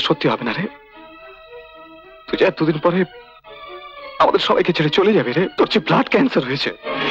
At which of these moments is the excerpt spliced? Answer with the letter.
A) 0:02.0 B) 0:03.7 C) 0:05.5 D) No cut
C